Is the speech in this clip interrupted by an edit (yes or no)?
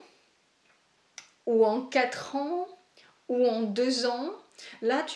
no